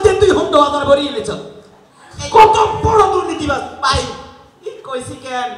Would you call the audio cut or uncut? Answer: uncut